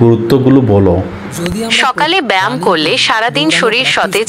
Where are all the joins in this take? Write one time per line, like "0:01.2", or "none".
none